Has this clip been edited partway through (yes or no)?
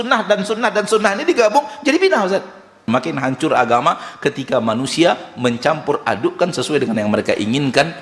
yes